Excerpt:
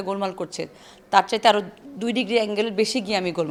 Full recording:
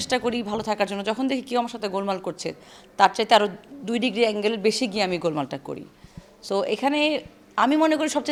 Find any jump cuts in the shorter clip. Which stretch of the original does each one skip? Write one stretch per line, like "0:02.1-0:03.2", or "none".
none